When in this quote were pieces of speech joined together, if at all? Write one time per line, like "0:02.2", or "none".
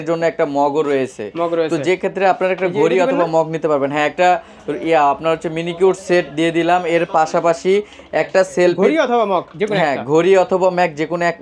none